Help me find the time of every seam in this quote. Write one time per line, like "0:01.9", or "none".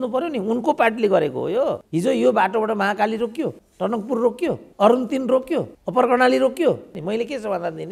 0:01.8
0:03.6
0:04.7
0:05.8
0:06.9